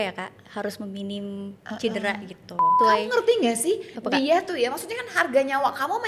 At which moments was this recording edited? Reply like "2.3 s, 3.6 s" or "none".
2.8 s